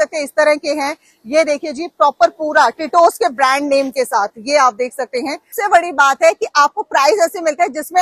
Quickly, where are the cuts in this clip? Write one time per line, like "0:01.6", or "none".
0:05.6